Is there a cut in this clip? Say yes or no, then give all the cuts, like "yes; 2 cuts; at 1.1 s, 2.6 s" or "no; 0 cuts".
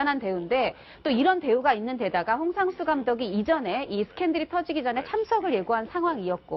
yes; 1 cut; at 3.2 s